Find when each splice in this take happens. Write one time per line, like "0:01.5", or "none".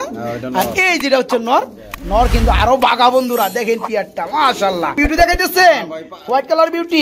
0:05.0